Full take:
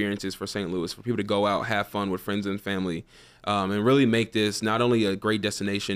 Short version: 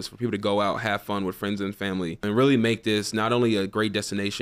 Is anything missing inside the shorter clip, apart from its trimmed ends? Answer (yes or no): yes